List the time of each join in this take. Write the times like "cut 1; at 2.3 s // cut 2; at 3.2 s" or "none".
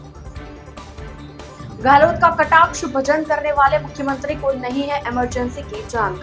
cut 1; at 1.1 s